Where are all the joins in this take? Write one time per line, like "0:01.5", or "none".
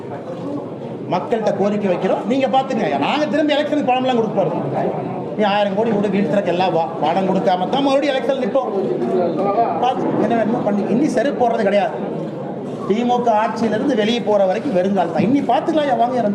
none